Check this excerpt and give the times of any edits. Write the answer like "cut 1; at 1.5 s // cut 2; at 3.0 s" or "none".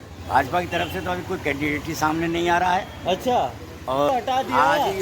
cut 1; at 4.1 s

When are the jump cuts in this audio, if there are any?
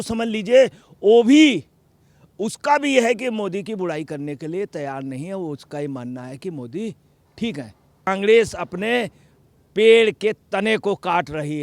cut 1; at 8.1 s

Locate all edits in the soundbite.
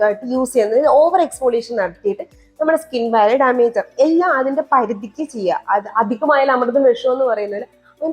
none

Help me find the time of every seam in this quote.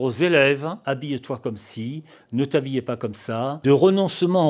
cut 1; at 3.6 s

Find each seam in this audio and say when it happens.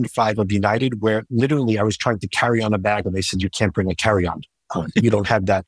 none

